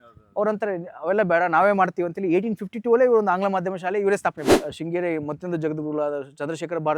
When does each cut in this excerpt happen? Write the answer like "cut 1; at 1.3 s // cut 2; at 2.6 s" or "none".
cut 1; at 4.5 s